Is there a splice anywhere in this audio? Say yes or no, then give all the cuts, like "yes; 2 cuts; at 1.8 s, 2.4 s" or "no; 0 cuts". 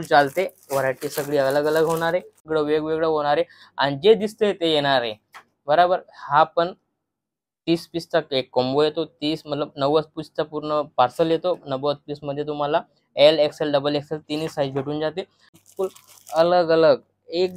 yes; 2 cuts; at 2.4 s, 15.4 s